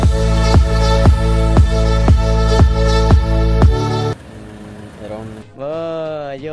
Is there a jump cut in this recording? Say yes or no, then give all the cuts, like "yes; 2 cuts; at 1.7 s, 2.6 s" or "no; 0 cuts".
yes; 1 cut; at 4.1 s